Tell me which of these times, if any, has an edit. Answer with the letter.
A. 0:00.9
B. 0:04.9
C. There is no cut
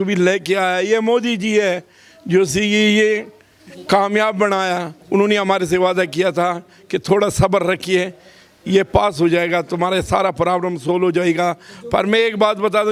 B